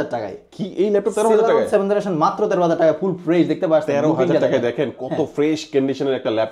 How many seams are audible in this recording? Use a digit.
0